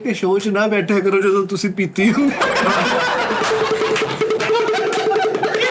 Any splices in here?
no; 0 cuts

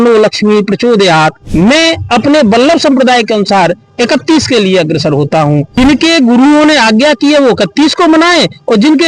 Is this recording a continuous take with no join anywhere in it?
no; 2 cuts; at 1.4 s, 5.7 s

